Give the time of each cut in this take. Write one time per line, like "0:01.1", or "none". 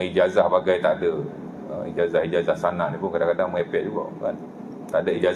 none

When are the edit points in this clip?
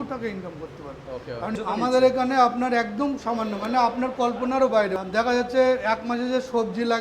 0:01.5
0:04.9

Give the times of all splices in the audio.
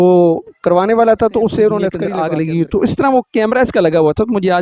0:02.0

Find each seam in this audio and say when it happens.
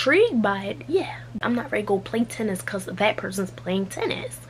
0:01.3

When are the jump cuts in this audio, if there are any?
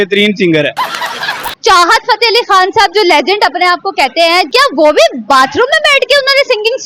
0:01.4
0:04.5

